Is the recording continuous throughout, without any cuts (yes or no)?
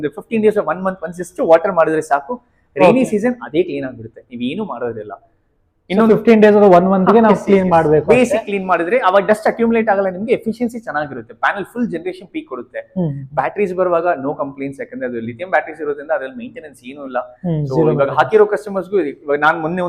yes